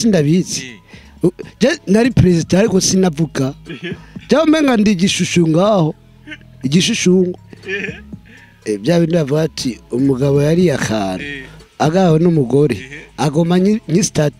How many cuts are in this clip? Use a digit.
0